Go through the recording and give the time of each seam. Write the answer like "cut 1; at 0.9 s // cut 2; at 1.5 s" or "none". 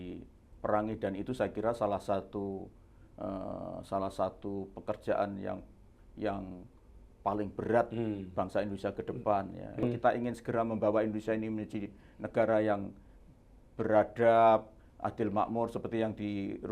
cut 1; at 9.8 s